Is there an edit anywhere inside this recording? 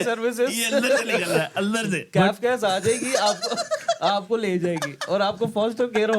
no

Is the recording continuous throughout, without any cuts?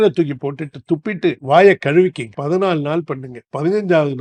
yes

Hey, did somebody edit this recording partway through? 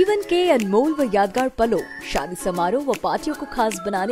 no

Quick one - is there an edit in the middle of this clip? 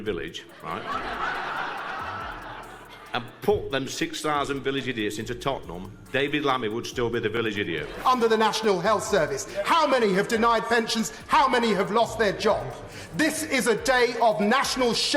no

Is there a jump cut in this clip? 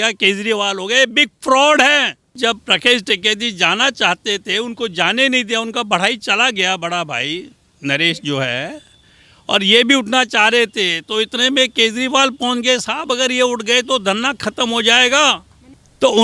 yes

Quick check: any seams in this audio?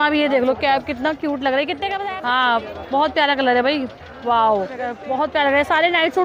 yes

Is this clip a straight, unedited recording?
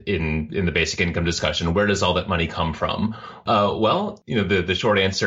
no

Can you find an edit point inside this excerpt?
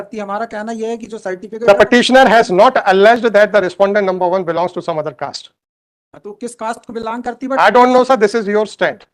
no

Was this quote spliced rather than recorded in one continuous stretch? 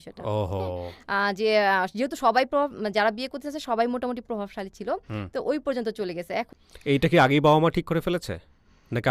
no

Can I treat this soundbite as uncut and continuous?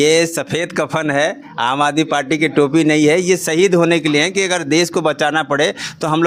yes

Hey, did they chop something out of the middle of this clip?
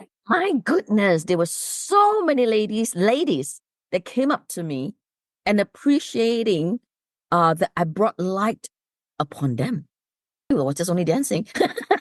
yes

